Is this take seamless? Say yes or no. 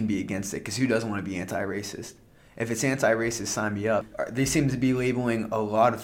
no